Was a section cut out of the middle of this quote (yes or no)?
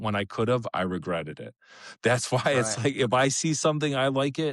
no